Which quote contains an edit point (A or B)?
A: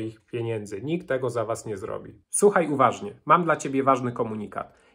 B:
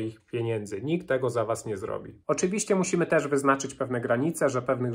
B